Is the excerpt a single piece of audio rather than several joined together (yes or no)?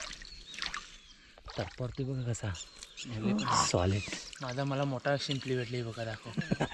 yes